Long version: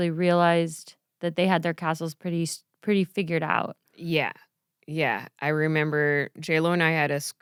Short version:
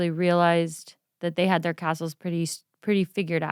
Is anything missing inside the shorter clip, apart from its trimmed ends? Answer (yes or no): no